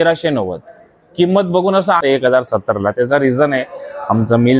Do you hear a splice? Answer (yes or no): yes